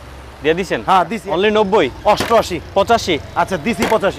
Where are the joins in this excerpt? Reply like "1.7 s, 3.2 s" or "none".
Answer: 1.1 s